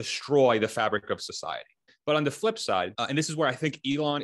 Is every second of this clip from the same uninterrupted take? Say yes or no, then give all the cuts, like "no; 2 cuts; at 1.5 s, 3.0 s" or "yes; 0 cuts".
no; 2 cuts; at 1.9 s, 3.0 s